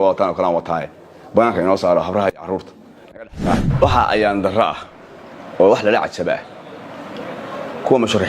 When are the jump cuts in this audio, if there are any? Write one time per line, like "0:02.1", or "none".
0:03.7